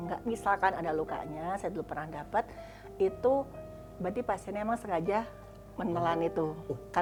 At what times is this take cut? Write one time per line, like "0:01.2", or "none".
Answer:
none